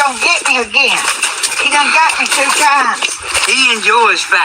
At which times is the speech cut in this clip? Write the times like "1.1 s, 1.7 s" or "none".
3.3 s